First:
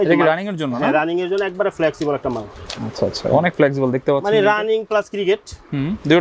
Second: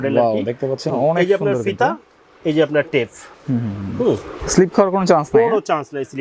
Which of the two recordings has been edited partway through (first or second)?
second